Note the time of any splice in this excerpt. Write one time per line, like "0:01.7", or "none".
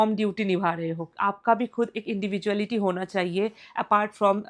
none

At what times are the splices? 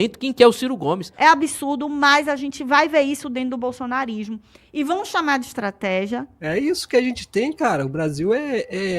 0:01.1
0:06.3

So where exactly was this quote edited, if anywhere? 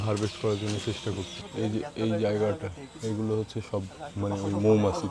0:01.4

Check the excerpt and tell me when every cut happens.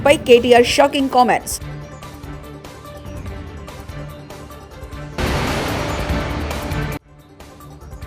0:01.5
0:03.6
0:05.1
0:06.7

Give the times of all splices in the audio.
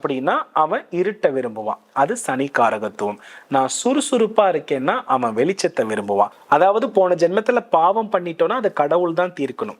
0:06.4

